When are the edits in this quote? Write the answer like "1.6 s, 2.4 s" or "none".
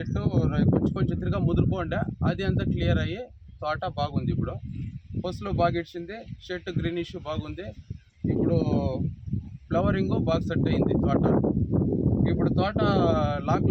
none

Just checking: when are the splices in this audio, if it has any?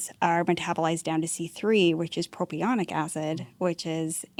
none

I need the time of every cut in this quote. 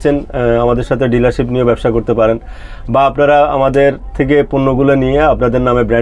none

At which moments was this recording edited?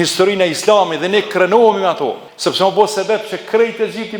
2.3 s

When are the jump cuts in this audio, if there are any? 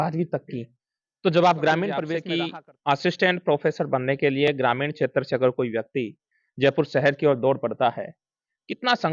2.2 s

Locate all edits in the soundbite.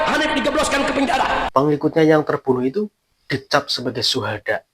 1.5 s

